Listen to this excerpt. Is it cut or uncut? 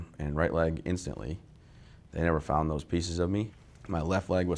cut